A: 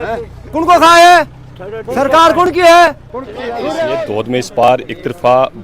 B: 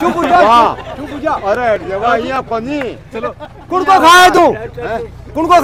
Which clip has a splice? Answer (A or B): A